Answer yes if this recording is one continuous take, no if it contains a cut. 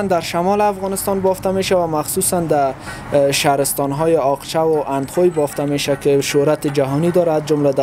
yes